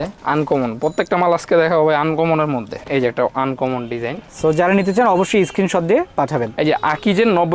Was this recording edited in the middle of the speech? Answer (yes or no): yes